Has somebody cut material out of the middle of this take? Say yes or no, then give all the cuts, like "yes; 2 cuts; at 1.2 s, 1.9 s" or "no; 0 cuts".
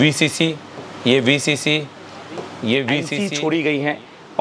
yes; 1 cut; at 3.1 s